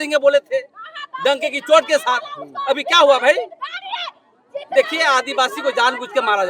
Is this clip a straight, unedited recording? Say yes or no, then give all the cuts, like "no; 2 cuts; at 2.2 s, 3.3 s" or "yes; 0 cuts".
yes; 0 cuts